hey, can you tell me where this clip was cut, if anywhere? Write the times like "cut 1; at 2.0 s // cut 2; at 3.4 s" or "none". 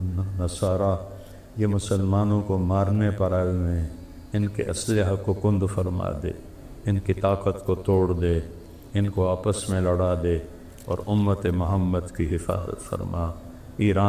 none